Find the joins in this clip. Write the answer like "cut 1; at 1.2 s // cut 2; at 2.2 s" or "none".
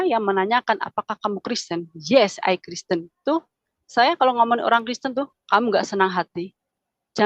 cut 1; at 3.1 s